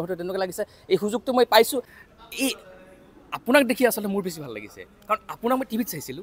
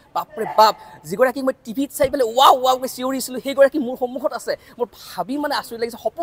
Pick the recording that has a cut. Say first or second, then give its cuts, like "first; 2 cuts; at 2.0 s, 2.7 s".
first; 1 cut; at 1.7 s